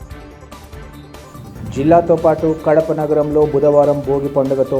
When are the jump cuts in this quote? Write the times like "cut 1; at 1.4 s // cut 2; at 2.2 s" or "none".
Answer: cut 1; at 1.2 s